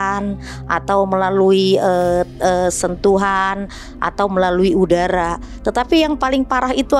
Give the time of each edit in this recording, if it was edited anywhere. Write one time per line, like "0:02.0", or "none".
none